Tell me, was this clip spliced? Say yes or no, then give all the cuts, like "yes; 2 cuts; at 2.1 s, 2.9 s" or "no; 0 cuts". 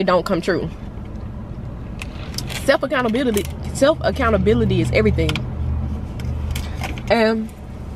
no; 0 cuts